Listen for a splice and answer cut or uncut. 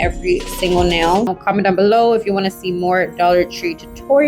cut